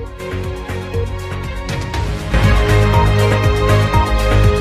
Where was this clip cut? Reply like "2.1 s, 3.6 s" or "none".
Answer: 1.0 s